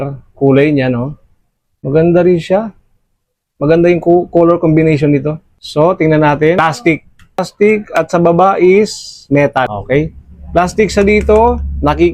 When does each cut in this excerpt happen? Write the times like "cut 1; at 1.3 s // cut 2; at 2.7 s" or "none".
none